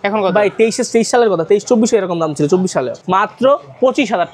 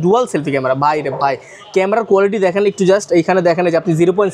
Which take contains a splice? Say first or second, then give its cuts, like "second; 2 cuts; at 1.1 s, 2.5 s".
first; 1 cut; at 3.0 s